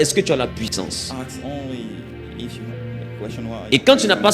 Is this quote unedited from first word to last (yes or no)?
yes